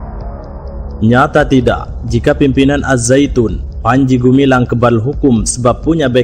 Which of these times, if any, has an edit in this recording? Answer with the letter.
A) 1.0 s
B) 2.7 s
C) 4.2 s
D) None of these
A